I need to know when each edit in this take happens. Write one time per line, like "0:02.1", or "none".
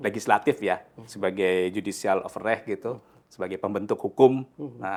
none

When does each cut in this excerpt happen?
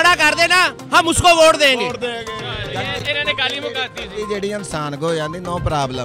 none

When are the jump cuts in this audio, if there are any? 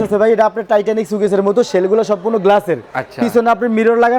none

